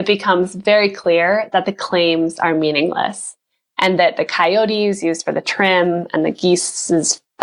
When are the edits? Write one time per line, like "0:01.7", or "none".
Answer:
none